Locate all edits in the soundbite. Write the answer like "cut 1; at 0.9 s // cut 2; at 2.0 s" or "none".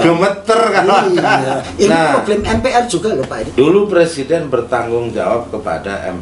cut 1; at 1.6 s // cut 2; at 3.3 s